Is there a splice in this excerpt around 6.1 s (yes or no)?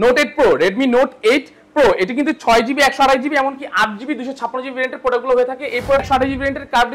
yes